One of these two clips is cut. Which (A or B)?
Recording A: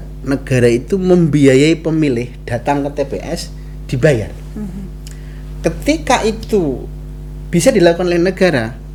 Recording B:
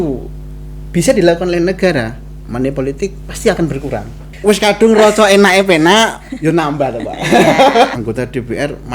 B